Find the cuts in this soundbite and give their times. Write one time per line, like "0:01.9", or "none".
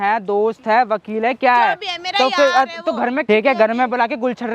0:03.2